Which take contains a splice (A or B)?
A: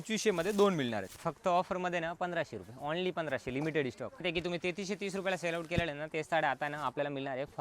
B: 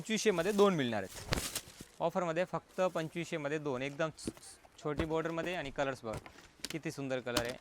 A